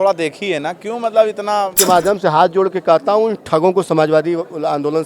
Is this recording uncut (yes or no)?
no